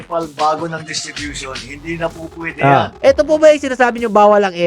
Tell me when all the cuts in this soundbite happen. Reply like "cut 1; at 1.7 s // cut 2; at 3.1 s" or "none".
cut 1; at 2.9 s

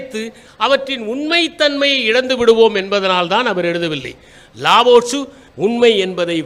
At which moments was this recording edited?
cut 1; at 5.4 s

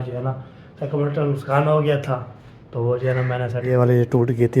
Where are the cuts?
cut 1; at 3.6 s

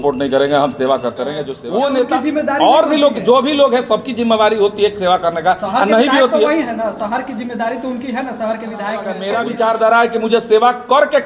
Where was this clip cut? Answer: cut 1; at 1.5 s // cut 2; at 9.1 s

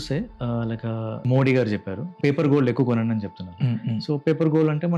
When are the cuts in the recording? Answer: cut 1; at 1.1 s // cut 2; at 2.1 s

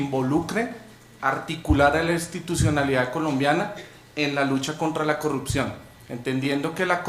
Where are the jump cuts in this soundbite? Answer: none

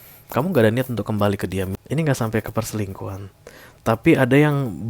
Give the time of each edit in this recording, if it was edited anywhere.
cut 1; at 1.8 s

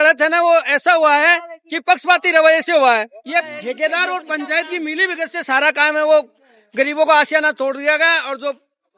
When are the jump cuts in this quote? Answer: cut 1; at 3.2 s

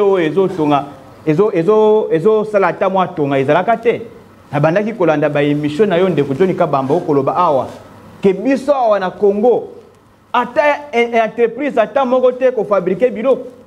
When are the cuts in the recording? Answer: none

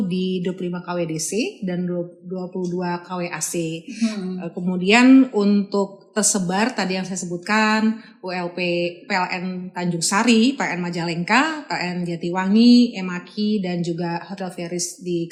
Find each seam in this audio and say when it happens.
none

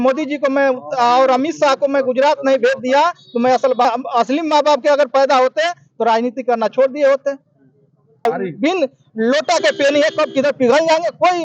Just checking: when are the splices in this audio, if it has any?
cut 1; at 3.8 s // cut 2; at 8.3 s

